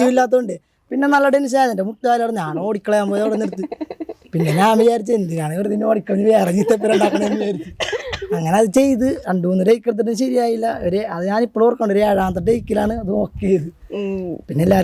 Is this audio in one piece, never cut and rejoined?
yes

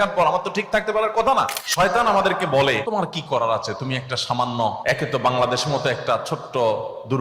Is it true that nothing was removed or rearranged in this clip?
no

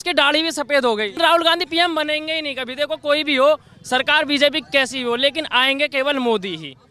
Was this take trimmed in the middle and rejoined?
yes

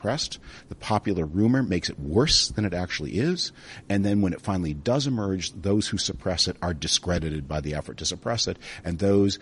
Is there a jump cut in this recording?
no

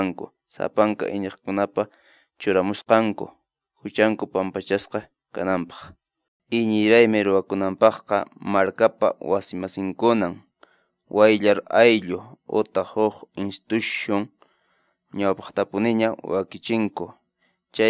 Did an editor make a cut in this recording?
yes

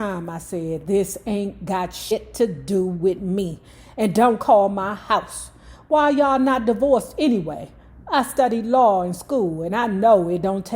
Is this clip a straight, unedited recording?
no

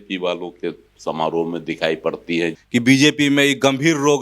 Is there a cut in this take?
yes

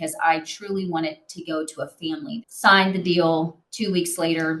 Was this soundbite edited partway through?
yes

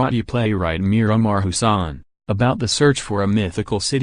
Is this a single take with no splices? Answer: no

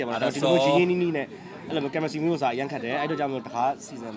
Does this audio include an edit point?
no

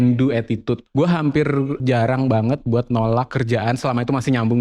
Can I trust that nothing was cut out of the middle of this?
no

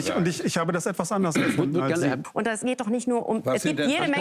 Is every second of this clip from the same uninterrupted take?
no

